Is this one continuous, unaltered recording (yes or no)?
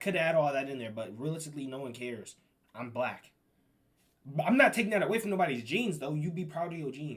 yes